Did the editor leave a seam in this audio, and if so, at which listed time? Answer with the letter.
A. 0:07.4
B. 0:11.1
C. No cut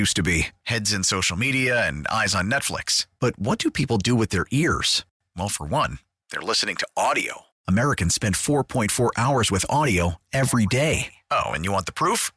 C